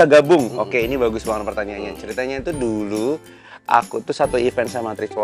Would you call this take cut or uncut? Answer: uncut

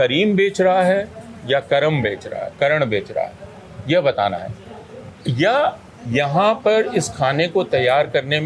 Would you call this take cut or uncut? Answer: uncut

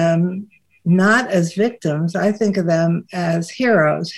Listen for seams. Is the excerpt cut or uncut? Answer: uncut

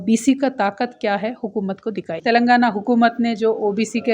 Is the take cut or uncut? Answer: cut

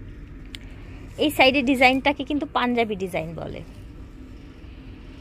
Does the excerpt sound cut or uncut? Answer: uncut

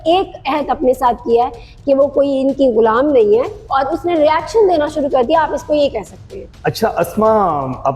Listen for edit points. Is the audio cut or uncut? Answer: uncut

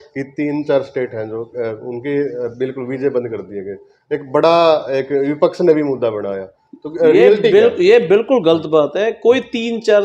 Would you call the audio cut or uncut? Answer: uncut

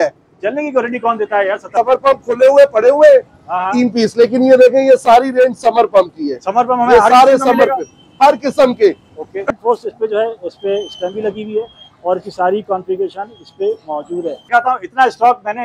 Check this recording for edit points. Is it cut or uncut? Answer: cut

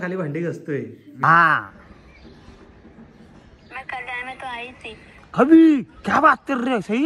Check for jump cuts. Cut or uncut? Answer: cut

